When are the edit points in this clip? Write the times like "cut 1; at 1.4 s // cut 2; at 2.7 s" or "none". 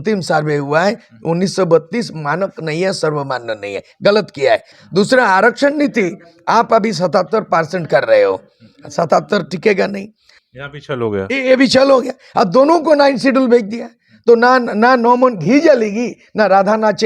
cut 1; at 4.7 s // cut 2; at 10.3 s